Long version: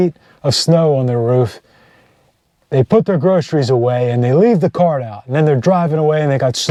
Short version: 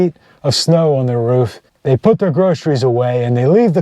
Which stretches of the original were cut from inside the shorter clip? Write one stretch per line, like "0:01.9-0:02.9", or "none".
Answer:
0:01.7-0:02.5